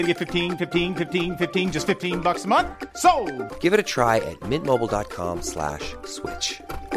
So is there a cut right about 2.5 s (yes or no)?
no